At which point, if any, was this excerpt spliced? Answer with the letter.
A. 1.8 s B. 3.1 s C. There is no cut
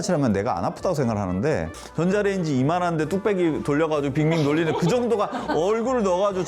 A